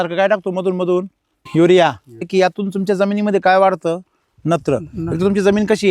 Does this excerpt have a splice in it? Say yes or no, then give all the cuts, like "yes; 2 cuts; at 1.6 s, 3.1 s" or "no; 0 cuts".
yes; 2 cuts; at 1.4 s, 2.2 s